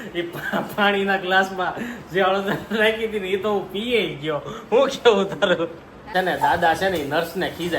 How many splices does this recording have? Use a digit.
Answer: 1